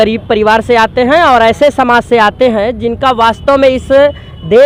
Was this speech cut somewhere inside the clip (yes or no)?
no